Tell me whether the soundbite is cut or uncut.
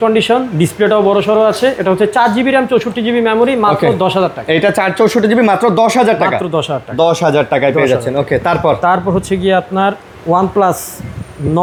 uncut